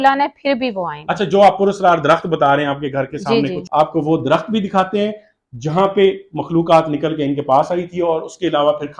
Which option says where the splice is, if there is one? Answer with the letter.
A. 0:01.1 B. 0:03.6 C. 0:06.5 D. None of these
B